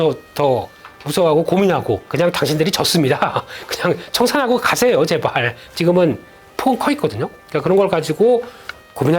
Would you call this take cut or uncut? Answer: cut